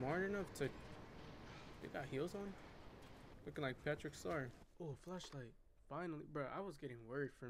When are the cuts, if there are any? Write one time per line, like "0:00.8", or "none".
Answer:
0:04.5